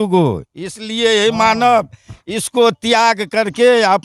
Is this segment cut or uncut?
uncut